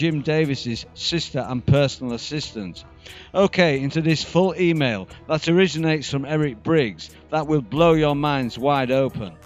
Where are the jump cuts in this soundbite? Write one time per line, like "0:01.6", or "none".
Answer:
none